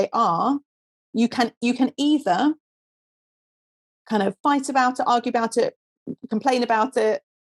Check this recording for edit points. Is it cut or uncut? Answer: uncut